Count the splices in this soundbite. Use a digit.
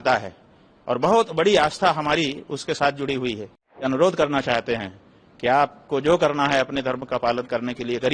1